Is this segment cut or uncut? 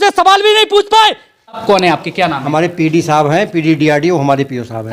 cut